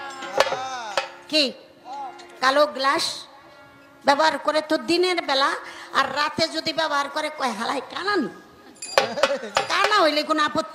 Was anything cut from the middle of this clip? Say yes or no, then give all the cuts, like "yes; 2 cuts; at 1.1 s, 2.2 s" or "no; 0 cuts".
no; 0 cuts